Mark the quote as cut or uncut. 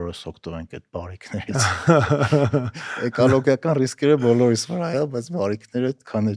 uncut